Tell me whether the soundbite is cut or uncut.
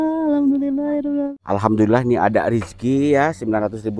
cut